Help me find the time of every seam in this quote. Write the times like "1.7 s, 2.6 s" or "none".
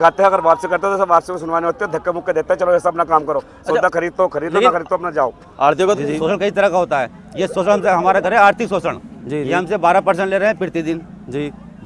6.0 s